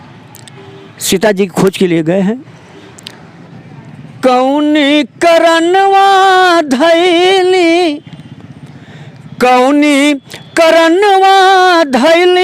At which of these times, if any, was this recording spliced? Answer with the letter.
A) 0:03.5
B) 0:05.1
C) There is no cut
A